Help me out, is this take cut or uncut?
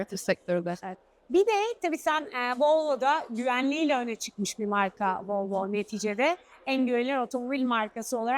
uncut